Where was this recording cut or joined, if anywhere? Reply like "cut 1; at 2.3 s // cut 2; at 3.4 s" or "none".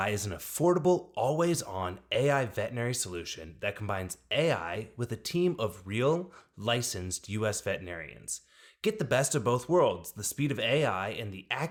none